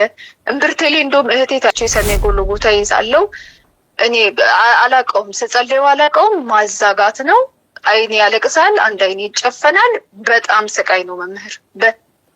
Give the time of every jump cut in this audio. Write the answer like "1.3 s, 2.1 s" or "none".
1.7 s